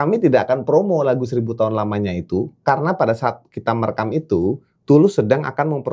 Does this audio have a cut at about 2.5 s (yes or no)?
no